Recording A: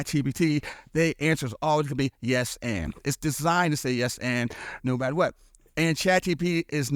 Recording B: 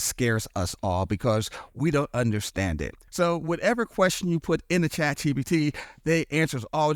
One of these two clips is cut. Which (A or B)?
B